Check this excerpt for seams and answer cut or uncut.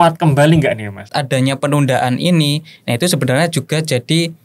cut